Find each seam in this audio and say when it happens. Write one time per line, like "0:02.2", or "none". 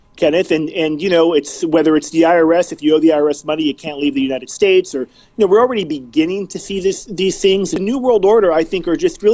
0:07.8